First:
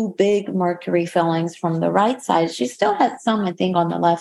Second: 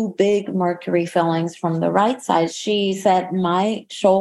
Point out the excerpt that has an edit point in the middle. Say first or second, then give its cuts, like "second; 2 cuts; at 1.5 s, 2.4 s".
second; 1 cut; at 2.5 s